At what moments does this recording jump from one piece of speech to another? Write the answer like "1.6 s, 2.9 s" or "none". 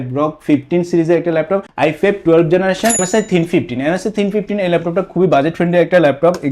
1.7 s, 3.0 s